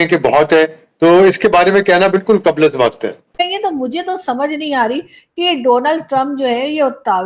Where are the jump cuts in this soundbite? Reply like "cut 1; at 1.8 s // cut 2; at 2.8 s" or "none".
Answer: cut 1; at 3.4 s